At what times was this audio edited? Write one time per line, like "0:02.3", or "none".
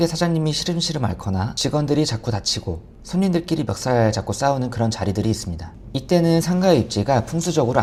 none